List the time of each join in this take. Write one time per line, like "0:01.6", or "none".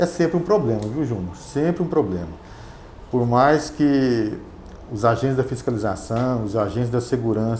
none